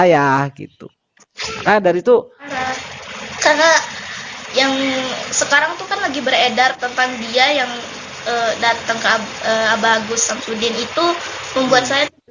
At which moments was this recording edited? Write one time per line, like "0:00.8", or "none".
0:02.4